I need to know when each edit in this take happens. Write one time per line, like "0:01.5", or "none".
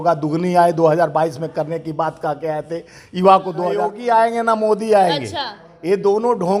0:03.9